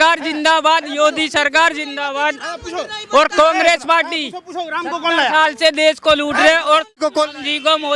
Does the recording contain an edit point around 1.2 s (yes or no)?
no